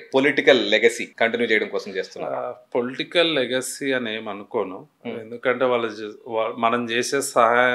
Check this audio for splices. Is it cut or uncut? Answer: cut